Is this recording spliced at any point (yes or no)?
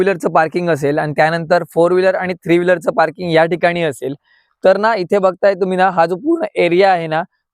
no